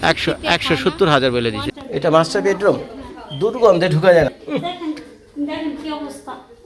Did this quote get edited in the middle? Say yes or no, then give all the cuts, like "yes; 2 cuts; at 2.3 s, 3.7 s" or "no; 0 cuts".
yes; 1 cut; at 1.7 s